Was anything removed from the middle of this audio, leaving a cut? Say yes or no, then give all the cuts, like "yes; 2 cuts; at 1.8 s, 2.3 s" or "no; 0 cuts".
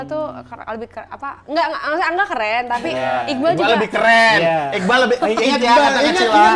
no; 0 cuts